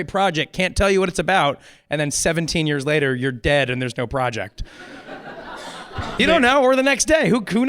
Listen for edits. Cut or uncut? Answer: cut